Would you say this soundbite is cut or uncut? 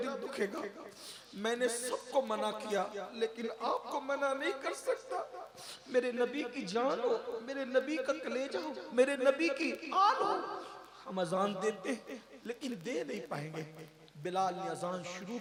uncut